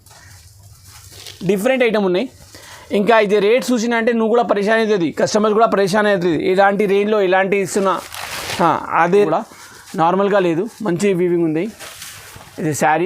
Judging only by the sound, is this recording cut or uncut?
cut